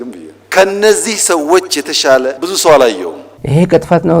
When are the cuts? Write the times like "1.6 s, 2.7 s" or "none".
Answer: 2.4 s, 3.3 s